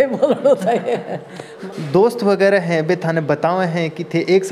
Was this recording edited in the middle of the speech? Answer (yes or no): yes